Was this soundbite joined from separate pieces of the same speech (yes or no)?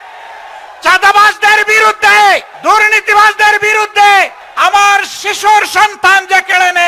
yes